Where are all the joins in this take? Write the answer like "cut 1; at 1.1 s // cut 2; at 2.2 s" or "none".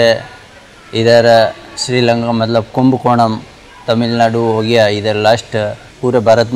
none